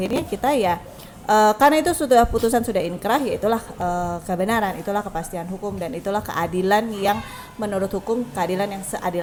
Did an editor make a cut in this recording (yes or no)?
no